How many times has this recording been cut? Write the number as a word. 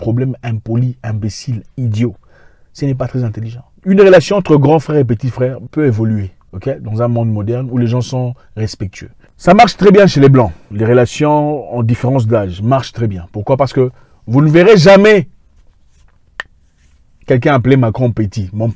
zero